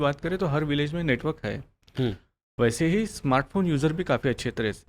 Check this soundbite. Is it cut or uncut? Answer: uncut